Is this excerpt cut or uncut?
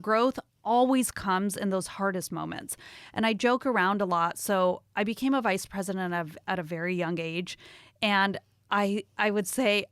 uncut